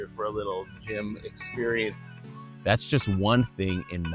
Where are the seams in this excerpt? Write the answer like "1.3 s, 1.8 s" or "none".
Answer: 2.1 s